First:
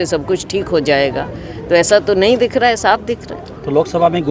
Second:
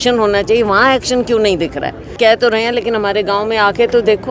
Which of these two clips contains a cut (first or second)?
second